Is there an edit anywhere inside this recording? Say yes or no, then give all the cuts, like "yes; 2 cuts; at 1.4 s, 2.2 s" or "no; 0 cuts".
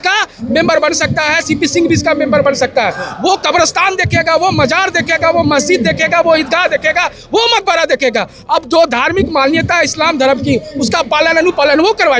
no; 0 cuts